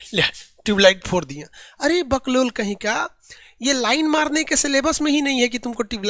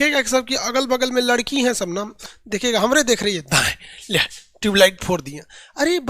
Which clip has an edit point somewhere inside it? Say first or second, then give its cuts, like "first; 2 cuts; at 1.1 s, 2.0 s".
second; 1 cut; at 2.1 s